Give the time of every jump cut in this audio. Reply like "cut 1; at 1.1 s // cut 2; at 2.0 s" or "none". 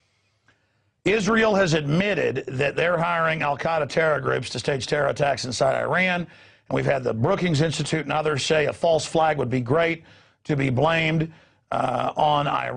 cut 1; at 7.4 s